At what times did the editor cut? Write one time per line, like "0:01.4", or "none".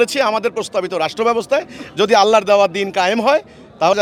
none